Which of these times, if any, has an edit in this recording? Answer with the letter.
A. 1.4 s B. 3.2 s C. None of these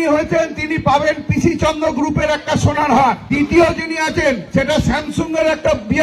B